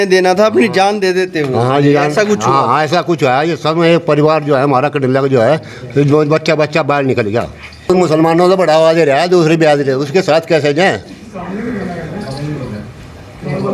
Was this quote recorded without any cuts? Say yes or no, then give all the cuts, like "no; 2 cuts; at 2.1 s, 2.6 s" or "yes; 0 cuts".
no; 1 cut; at 7.9 s